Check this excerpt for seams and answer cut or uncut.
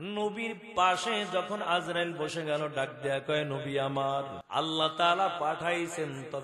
cut